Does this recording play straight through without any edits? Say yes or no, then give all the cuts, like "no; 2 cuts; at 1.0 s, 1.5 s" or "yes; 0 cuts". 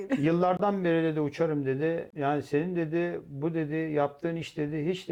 yes; 0 cuts